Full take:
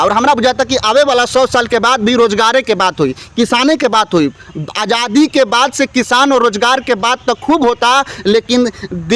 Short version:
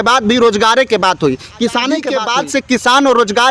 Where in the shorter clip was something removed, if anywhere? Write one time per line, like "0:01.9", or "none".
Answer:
0:02.1